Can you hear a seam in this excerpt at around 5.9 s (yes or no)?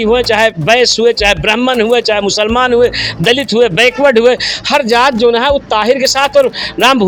no